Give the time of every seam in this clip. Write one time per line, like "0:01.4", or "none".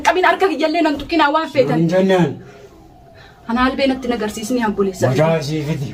none